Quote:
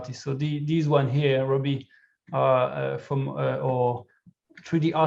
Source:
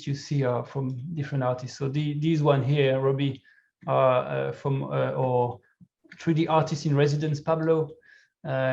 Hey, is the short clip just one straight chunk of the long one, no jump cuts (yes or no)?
yes